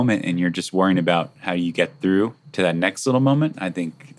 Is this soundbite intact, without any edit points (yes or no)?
no